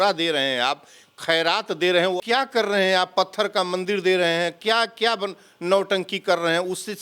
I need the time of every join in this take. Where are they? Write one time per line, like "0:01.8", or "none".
0:02.2

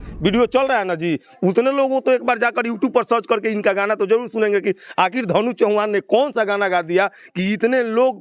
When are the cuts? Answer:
none

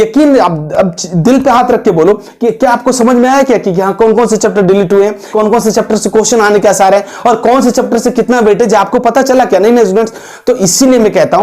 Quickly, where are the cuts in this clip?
0:05.2

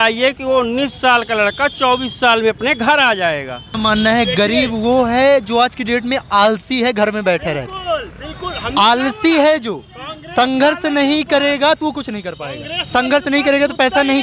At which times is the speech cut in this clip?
0:03.7

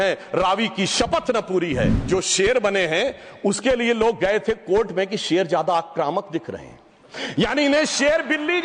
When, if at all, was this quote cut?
0:02.0

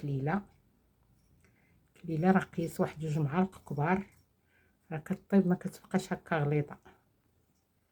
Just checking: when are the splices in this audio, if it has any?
none

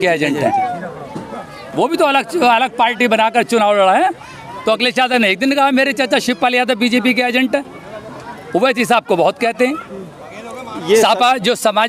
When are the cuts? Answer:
none

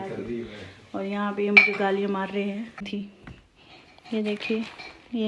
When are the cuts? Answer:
0:02.8

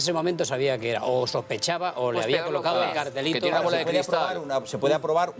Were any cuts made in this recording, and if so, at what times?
0:02.6

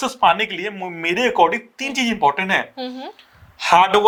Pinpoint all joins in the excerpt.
none

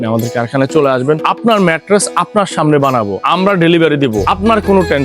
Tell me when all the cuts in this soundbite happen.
0:01.2
0:03.2
0:04.2

